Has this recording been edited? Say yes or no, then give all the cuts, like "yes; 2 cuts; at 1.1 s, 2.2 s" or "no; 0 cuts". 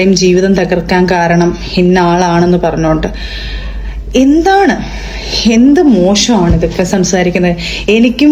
no; 0 cuts